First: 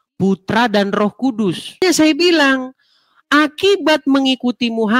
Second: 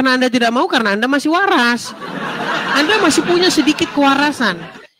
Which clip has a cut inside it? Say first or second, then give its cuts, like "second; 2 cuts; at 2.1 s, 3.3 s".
first; 1 cut; at 1.8 s